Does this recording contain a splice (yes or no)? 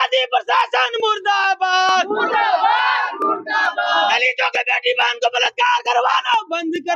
no